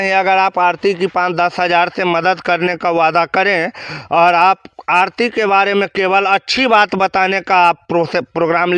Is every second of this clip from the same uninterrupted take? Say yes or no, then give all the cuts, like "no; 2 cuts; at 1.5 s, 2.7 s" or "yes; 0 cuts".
yes; 0 cuts